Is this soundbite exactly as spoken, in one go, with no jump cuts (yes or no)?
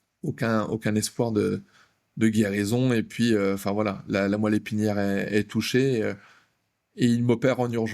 yes